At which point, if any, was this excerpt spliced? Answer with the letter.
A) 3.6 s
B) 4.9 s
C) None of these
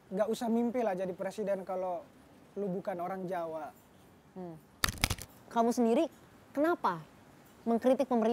B